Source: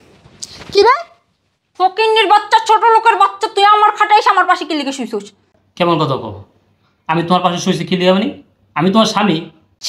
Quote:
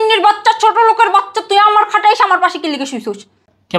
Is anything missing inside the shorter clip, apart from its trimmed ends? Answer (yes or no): no